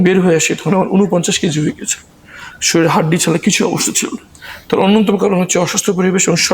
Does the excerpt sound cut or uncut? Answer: uncut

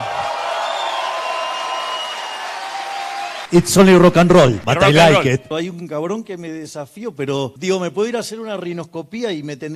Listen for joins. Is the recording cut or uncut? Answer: cut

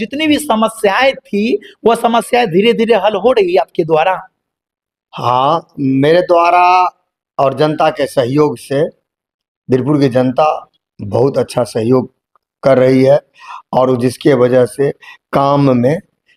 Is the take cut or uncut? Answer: uncut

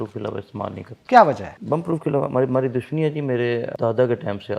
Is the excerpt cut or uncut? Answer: cut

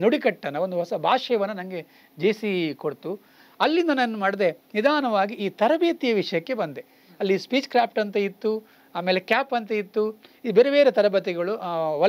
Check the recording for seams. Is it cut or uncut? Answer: uncut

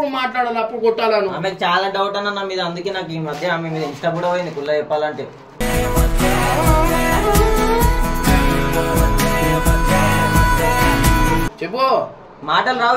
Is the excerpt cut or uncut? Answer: cut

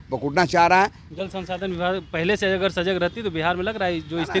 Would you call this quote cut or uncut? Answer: cut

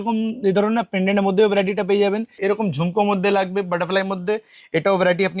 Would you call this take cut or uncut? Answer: cut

